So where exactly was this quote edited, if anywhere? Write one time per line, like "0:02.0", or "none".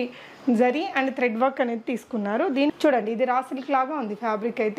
0:02.8

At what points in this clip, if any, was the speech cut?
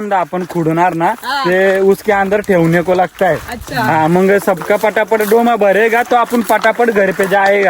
0:04.4

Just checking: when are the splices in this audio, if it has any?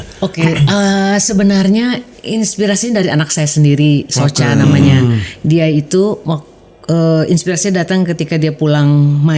none

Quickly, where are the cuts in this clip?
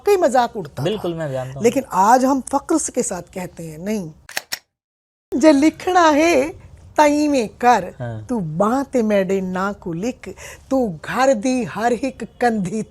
0:04.6

